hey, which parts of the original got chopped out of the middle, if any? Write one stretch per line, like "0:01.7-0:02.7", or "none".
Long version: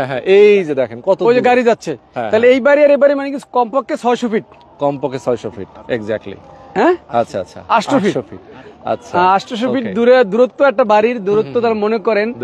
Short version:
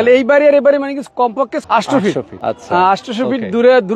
0:03.9-0:07.6
0:08.3-0:08.8